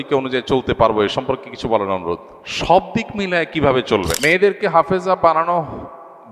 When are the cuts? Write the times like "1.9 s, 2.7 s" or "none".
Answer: 4.2 s